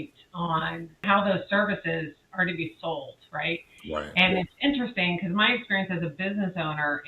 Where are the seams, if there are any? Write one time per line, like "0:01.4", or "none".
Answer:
0:01.0